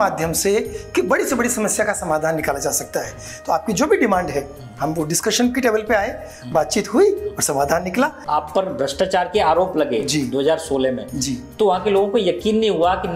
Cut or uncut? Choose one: cut